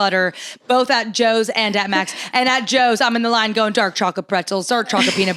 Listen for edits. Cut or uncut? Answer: uncut